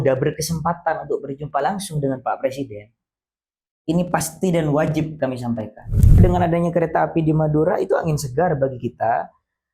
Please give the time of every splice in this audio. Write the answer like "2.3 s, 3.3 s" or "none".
6.2 s